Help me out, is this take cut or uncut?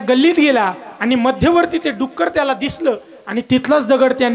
uncut